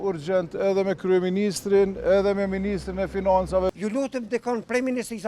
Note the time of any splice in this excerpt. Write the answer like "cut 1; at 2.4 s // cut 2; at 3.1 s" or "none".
cut 1; at 3.7 s